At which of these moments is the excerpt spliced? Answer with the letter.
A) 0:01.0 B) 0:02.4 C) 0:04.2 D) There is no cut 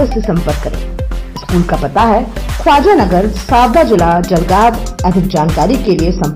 D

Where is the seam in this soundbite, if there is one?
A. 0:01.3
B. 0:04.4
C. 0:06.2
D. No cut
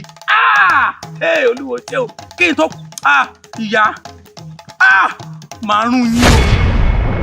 C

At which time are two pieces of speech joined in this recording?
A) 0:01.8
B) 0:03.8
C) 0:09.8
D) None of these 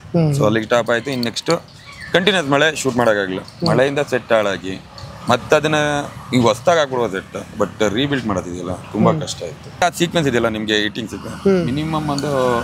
C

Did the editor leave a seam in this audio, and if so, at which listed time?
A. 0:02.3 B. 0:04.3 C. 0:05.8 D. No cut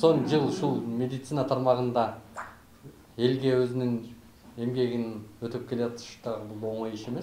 D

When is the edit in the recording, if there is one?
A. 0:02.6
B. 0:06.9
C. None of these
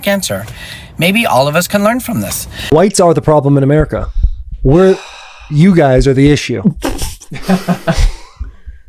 A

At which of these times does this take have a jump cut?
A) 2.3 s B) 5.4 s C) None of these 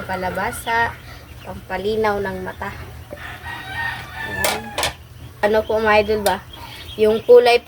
B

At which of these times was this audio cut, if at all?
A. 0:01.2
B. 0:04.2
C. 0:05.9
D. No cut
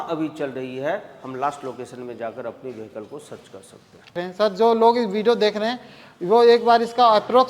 B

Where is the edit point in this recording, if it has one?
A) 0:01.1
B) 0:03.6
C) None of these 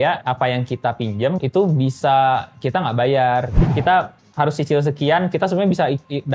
B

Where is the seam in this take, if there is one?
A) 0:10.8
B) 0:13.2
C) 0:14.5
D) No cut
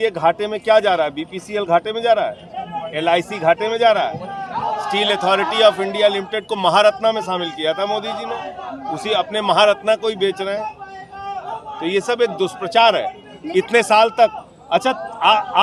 D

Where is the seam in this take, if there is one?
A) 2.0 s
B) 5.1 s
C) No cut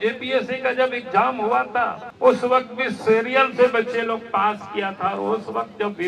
A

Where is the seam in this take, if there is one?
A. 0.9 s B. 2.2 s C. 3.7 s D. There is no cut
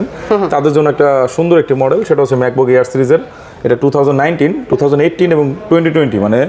D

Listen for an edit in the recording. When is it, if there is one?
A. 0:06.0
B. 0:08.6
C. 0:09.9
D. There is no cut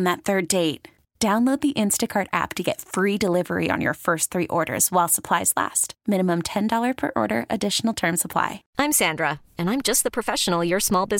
B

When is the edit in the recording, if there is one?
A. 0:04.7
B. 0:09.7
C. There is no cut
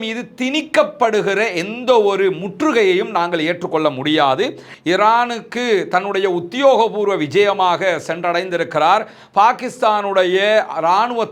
A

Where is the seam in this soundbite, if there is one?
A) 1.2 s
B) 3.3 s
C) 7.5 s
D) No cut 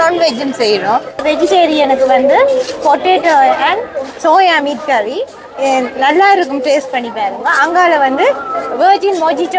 A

